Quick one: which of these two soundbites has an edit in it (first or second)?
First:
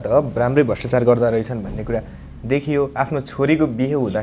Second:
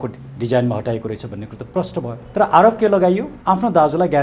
second